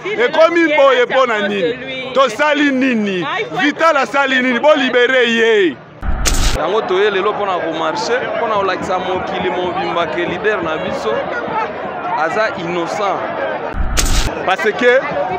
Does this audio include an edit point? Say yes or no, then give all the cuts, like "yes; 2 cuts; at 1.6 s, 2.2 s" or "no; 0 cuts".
yes; 2 cuts; at 6.2 s, 13.9 s